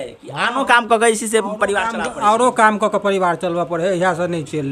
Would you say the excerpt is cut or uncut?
uncut